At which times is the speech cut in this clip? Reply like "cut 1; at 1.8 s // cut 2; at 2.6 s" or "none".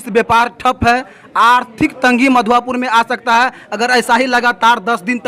none

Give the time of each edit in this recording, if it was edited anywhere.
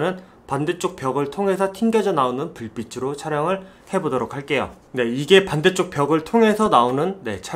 none

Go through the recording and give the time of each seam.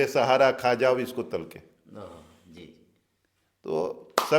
none

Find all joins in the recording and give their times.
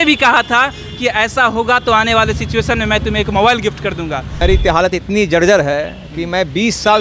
cut 1; at 4.3 s

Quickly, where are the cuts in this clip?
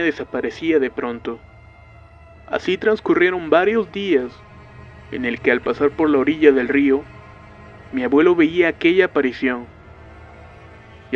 cut 1; at 3.6 s

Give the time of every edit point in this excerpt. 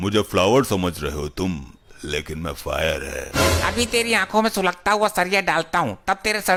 none

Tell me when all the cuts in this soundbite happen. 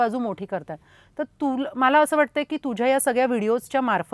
none

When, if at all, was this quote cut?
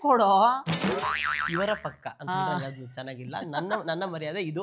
none

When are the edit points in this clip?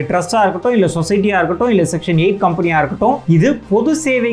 cut 1; at 3.2 s

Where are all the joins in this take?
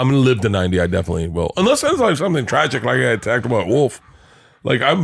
none

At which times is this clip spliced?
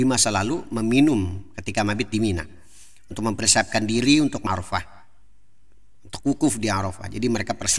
cut 1; at 4.4 s

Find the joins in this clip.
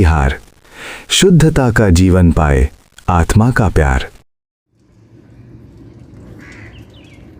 cut 1; at 6.4 s

